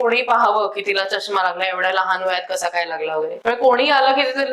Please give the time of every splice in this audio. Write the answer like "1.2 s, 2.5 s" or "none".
3.4 s